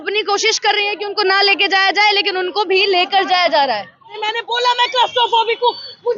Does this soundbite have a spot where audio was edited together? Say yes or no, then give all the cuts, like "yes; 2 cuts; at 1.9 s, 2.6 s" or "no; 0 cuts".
yes; 1 cut; at 4.2 s